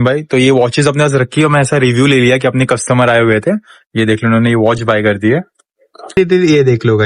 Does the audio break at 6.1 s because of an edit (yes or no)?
yes